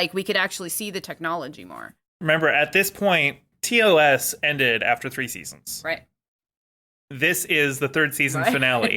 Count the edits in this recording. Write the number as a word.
one